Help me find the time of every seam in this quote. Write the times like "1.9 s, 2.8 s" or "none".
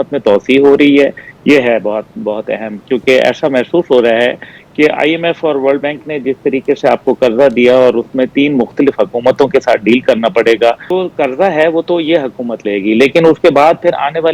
10.8 s